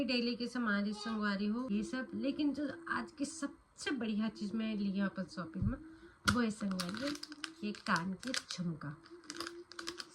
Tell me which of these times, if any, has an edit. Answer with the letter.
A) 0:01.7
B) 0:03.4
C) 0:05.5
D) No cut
A